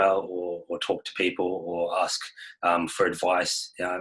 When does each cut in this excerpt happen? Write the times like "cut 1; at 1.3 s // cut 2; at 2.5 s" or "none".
none